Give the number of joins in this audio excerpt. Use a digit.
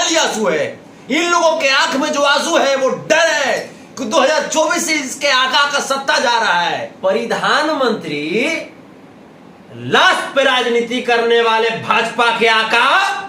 1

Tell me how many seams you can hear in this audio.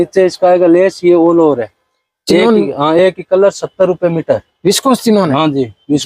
0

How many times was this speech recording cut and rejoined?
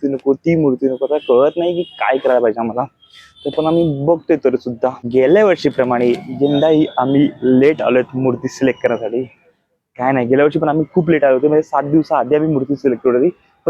1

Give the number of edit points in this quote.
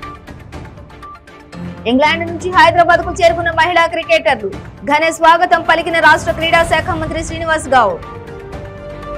1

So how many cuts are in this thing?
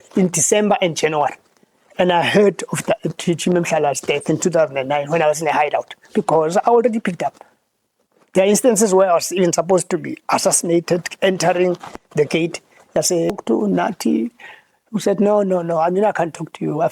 1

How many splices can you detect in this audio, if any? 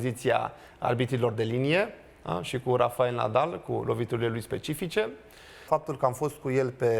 1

